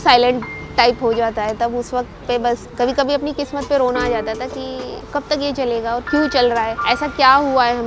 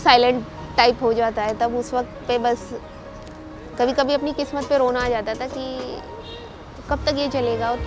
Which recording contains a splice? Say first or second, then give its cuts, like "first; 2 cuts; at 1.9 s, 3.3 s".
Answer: first; 3 cuts; at 2.7 s, 5.0 s, 6.8 s